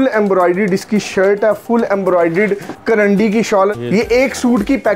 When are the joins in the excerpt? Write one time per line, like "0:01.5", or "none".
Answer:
0:02.7
0:03.7